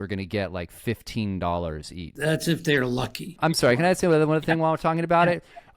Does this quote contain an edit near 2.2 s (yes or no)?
yes